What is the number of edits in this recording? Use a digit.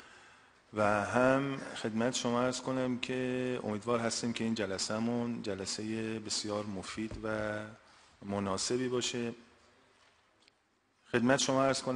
0